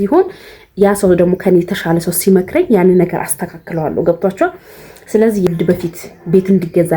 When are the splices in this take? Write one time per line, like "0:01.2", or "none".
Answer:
0:05.5